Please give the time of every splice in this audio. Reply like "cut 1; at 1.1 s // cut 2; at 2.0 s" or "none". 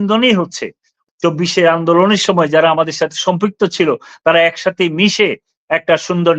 cut 1; at 1.0 s